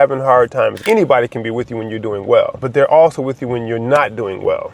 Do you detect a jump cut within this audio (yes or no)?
yes